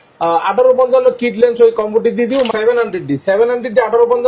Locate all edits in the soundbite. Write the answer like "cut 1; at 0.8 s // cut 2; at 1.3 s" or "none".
cut 1; at 2.5 s